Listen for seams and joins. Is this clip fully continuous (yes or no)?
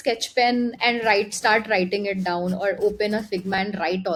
yes